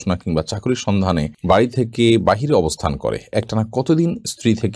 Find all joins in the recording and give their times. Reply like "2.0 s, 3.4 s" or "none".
1.3 s